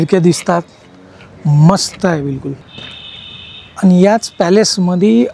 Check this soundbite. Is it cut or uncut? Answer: cut